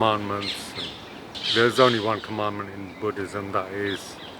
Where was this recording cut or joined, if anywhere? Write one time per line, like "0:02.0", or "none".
0:01.4

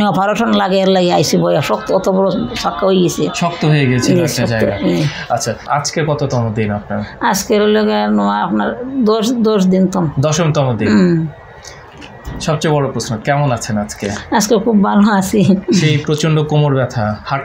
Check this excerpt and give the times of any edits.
0:05.6

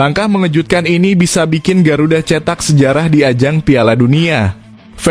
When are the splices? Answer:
none

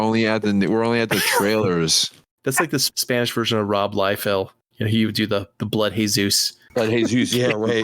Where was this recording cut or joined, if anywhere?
0:02.6
0:06.5

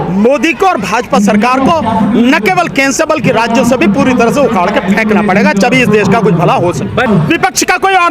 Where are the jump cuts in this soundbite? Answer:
0:07.1

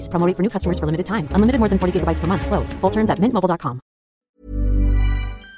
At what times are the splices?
0:04.2

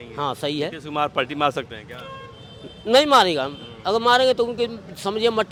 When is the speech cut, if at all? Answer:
none

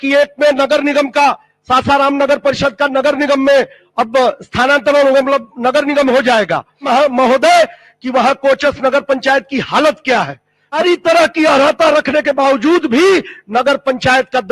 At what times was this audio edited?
0:06.9
0:10.8

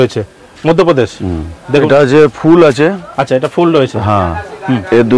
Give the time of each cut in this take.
0:01.8

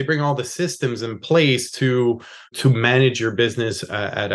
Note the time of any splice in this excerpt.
none

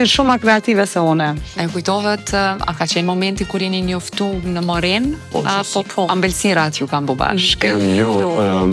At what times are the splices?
0:01.4

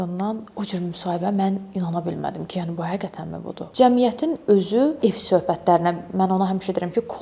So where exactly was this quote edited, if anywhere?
0:03.6
0:05.0

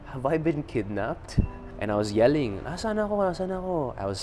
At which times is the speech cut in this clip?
0:01.6

